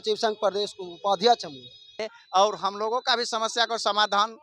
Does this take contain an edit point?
yes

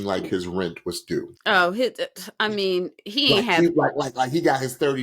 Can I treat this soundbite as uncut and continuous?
yes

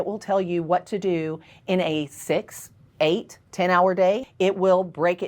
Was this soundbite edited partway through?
yes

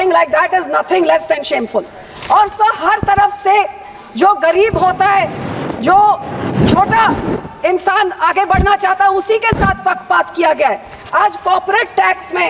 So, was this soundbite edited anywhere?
no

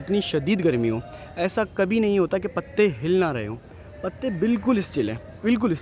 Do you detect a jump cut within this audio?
no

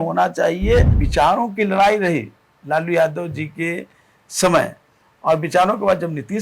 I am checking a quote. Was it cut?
yes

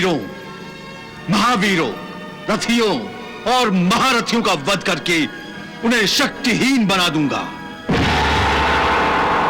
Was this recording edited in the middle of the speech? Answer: no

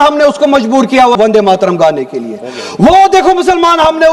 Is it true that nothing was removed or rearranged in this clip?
no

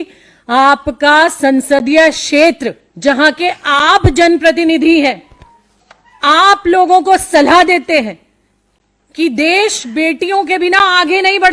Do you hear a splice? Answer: yes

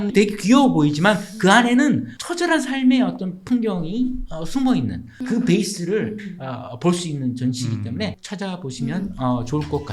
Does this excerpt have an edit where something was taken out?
yes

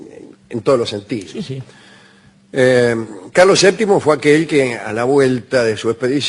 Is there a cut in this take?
no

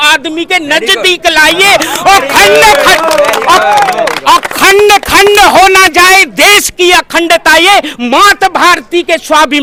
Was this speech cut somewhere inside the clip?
no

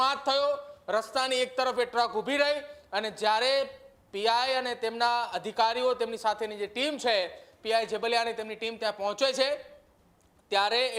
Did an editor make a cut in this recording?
no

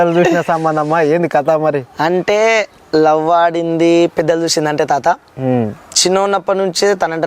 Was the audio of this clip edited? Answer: no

